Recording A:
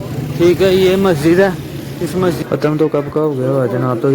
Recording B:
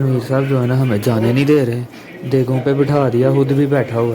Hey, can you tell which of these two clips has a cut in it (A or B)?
A